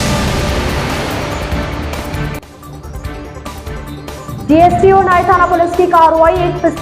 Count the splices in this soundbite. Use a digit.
1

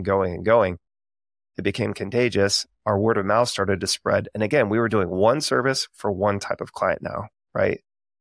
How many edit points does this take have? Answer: 1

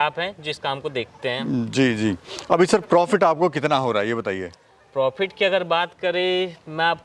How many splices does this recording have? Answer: 0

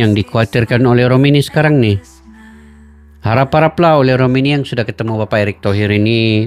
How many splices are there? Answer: 0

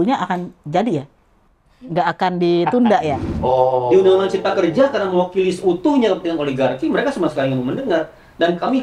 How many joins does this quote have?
1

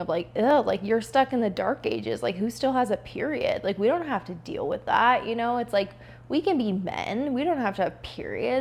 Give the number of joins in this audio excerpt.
0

